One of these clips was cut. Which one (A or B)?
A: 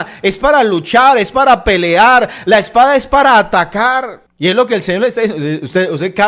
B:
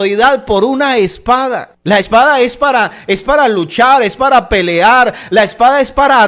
B